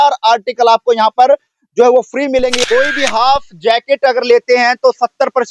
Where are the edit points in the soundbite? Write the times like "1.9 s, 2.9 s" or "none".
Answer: 2.6 s